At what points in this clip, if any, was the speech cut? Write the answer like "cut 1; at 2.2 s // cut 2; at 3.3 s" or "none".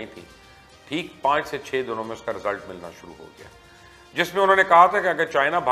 none